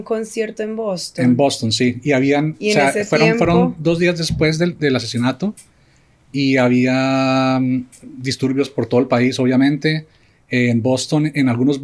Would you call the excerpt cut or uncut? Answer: uncut